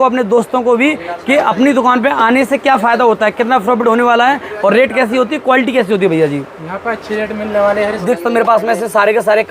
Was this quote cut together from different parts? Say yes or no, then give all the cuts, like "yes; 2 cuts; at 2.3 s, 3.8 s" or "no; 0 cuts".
yes; 1 cut; at 8.0 s